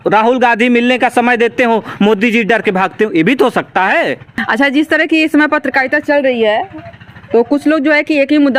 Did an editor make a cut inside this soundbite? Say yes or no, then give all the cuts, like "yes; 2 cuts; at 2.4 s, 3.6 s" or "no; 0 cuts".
yes; 1 cut; at 4.3 s